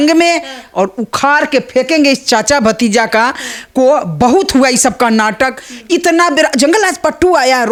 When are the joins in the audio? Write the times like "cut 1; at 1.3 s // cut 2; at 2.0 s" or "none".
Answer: none